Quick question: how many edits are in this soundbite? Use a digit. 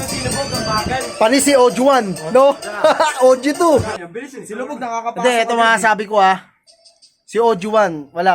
1